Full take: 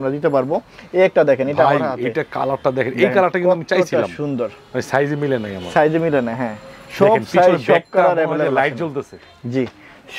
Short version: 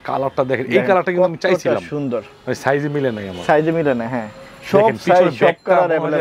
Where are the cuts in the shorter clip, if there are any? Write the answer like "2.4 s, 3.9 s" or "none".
none